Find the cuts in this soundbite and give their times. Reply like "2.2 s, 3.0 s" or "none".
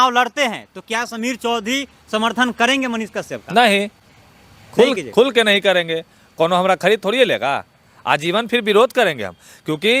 none